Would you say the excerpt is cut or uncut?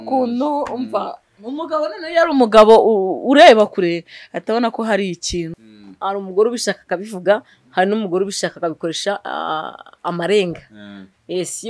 cut